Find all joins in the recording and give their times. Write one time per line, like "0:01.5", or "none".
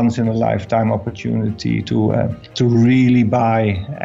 0:02.4